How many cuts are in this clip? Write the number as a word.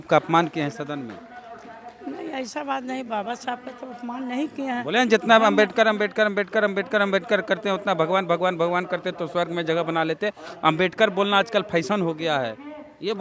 zero